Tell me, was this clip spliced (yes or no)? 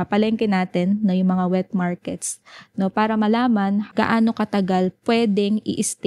yes